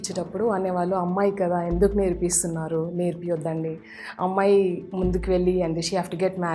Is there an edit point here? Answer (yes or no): no